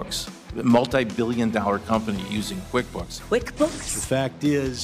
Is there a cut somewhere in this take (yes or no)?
yes